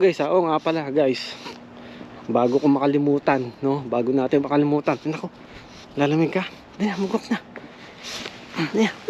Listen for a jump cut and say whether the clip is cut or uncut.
uncut